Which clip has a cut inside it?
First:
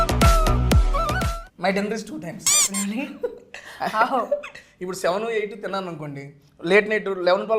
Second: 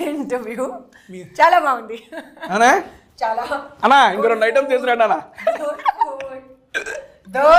first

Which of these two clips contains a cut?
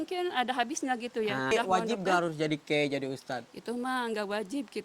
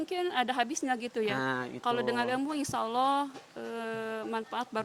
first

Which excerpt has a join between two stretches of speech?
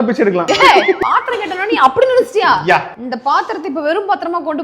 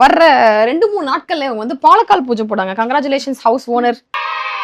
first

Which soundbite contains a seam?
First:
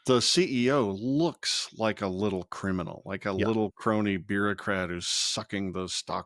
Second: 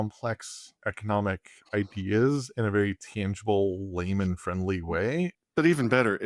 second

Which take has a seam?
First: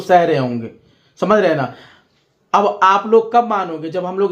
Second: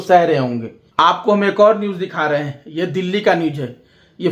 second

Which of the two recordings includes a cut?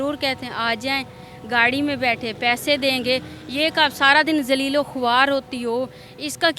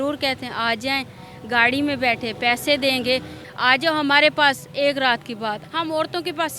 second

